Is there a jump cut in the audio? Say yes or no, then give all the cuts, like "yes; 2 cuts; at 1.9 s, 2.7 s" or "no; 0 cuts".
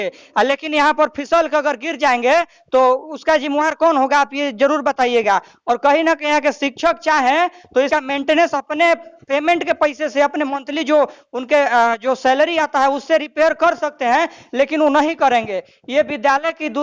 no; 0 cuts